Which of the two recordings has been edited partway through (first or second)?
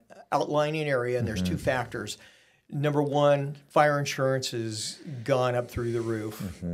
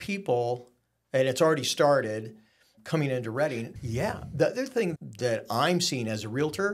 second